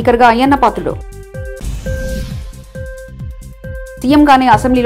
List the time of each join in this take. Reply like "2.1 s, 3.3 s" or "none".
none